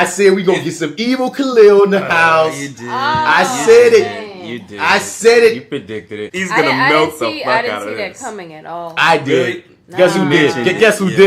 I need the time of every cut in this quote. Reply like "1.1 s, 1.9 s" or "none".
6.2 s